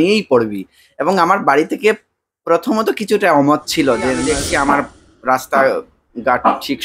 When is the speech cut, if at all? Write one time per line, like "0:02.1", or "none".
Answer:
0:04.4